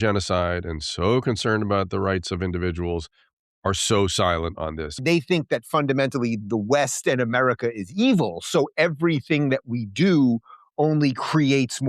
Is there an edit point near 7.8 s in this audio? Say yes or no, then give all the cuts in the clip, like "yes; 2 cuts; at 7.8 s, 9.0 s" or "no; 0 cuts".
no; 1 cut; at 5.0 s